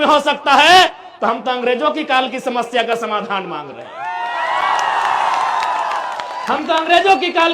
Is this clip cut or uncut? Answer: uncut